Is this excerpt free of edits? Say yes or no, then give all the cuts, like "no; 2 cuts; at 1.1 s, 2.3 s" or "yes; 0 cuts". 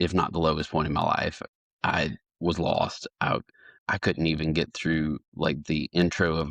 no; 1 cut; at 3.7 s